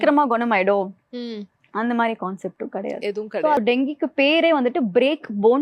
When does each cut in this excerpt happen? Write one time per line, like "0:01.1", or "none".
0:03.6